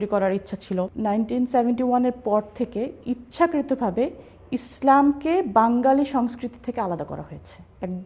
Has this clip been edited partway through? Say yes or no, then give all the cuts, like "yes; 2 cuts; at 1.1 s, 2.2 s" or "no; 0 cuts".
yes; 1 cut; at 0.9 s